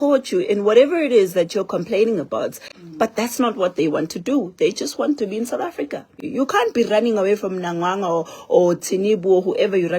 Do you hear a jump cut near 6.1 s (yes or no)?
yes